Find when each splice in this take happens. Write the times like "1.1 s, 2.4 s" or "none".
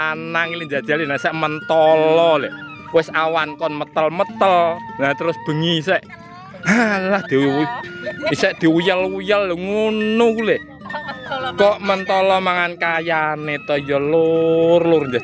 2.7 s